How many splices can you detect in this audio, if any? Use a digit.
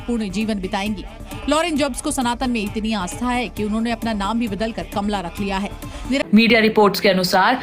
1